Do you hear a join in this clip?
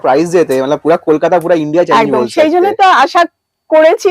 no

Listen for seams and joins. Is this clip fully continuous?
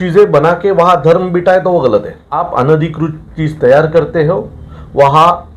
no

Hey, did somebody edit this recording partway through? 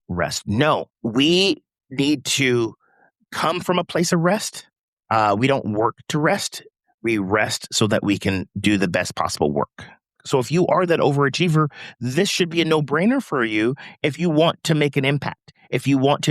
yes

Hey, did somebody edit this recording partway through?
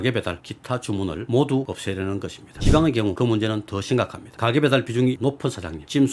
yes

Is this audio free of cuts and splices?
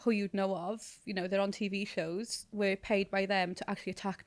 yes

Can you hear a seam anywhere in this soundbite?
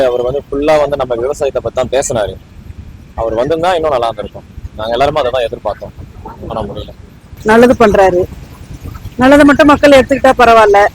yes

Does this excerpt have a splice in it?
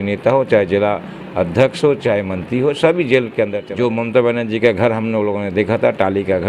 yes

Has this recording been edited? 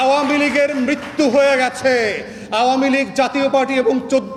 no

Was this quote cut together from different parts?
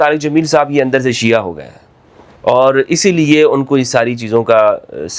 no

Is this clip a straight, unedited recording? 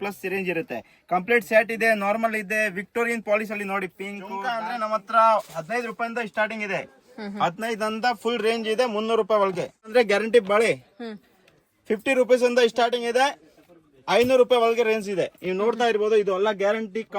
no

